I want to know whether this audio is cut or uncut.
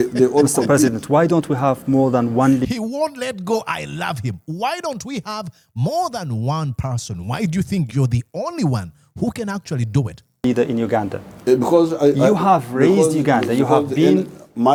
uncut